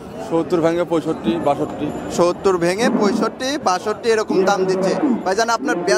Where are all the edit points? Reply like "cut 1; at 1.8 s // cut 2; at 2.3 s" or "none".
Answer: none